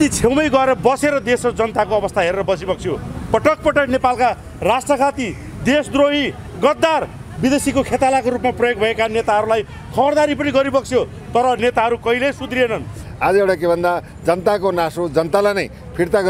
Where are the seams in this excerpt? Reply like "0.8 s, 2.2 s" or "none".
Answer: 13.0 s